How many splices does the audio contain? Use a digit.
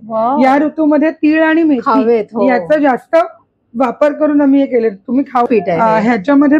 1